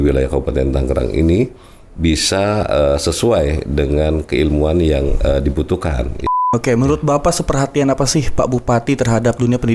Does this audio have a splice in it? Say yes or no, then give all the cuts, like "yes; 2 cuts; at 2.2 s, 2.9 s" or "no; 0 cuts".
yes; 1 cut; at 6.3 s